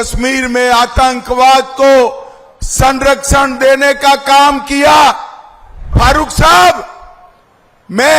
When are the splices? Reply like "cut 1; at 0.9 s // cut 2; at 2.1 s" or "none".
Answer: cut 1; at 5.9 s